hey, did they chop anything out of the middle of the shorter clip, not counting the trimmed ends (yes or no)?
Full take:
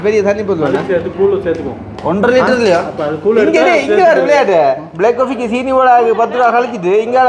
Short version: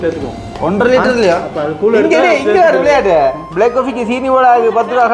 no